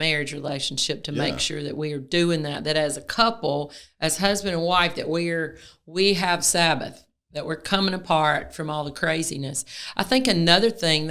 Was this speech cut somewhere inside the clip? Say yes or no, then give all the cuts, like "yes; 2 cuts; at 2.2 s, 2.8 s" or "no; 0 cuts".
no; 0 cuts